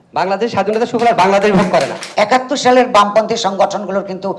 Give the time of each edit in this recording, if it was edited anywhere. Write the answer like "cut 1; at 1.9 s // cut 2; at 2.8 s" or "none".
cut 1; at 2.0 s

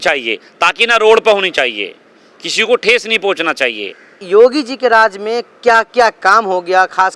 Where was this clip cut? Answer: none

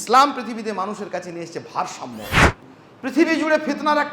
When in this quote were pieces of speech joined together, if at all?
cut 1; at 2.6 s

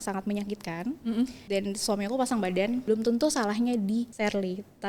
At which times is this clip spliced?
cut 1; at 1.4 s // cut 2; at 2.8 s // cut 3; at 4.1 s

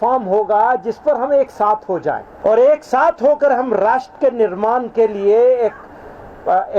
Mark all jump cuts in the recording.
cut 1; at 2.3 s

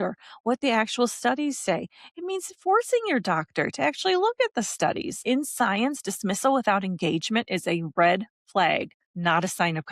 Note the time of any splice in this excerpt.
cut 1; at 5.2 s // cut 2; at 9.0 s

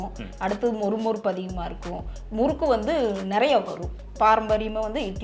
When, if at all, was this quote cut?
cut 1; at 4.1 s

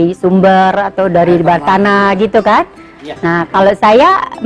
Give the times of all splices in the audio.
none

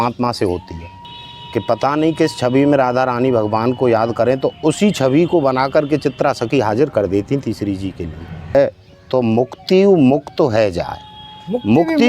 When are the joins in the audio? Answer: cut 1; at 1.1 s // cut 2; at 8.6 s

